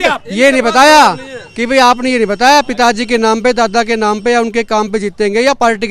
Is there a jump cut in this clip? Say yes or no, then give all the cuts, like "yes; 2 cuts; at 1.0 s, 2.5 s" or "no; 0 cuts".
no; 0 cuts